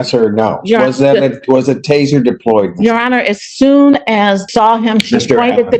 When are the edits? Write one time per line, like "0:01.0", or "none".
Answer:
0:04.5